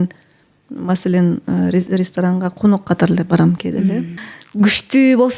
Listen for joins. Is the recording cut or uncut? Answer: cut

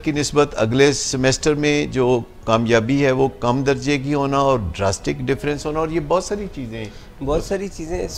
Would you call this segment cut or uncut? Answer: uncut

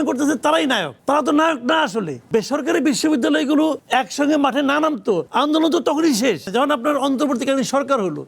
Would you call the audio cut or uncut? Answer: cut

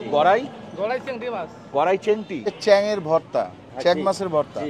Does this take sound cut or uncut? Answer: cut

